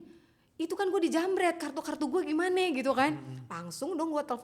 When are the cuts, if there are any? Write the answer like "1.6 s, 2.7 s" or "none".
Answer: none